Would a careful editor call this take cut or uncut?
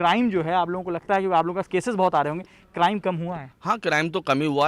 cut